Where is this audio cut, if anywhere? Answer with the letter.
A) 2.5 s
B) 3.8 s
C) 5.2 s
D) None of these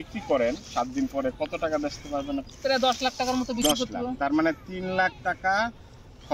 A